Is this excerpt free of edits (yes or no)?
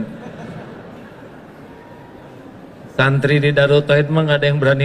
no